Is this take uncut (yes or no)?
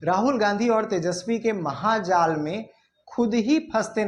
yes